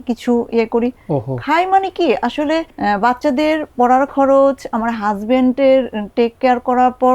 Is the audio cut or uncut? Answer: cut